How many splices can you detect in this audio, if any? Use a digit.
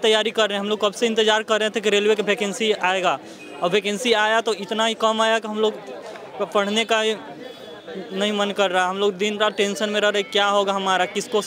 0